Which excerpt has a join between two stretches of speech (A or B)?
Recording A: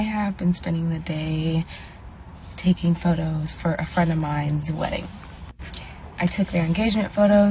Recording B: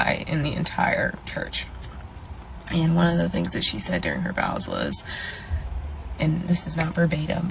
A